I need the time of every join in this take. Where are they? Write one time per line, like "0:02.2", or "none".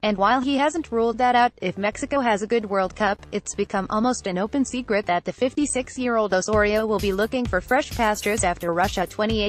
none

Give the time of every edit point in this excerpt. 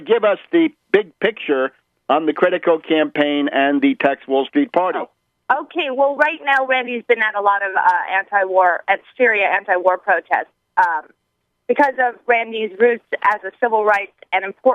0:13.0

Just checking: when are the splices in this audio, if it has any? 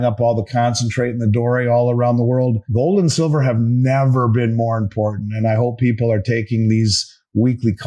0:02.6

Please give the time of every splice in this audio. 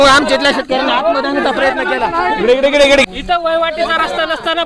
0:03.0

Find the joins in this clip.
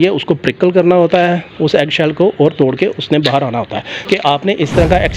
0:03.9

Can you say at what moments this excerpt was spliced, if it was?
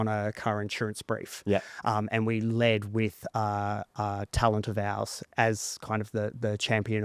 none

